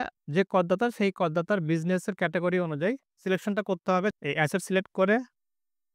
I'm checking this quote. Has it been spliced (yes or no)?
yes